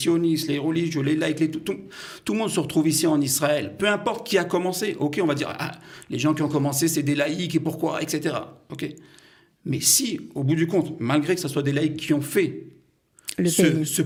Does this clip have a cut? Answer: no; 0 cuts

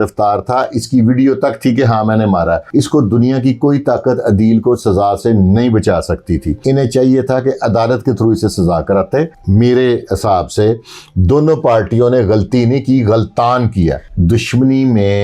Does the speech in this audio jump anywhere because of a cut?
yes; 4 cuts; at 2.6 s, 6.5 s, 9.4 s, 14.1 s

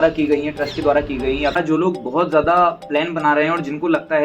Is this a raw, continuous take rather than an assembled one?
no; 1 cut; at 1.5 s

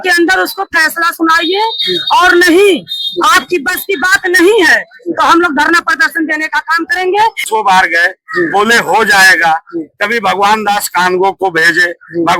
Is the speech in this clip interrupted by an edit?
yes; 1 cut; at 7.4 s

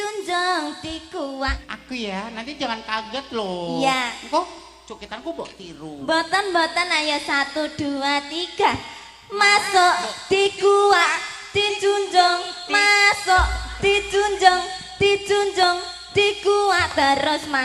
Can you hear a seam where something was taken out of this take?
yes; 1 cut; at 1.7 s

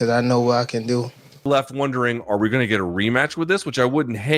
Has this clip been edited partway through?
yes; 1 cut; at 1.5 s

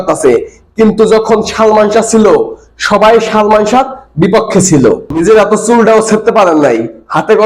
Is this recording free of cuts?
no; 1 cut; at 5.1 s

